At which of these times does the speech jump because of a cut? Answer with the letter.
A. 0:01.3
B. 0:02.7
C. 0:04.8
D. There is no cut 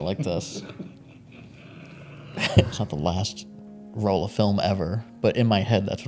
B